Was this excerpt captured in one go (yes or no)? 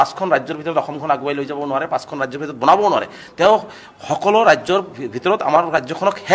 yes